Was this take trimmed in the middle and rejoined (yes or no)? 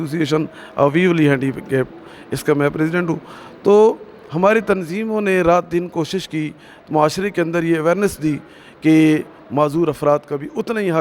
no